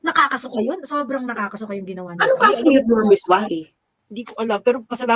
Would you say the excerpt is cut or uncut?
uncut